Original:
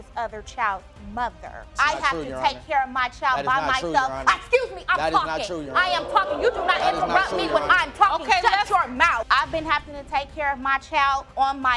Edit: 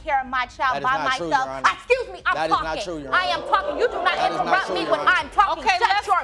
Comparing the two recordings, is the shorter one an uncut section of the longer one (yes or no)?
yes